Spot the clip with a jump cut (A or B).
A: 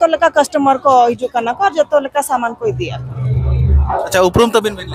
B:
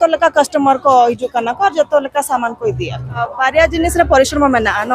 B